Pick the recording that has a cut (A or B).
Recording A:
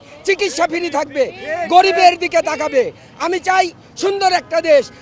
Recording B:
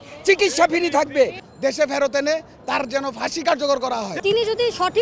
B